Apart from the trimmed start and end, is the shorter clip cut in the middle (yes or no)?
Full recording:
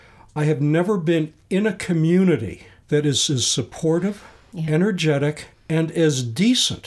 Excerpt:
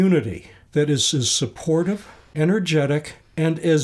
yes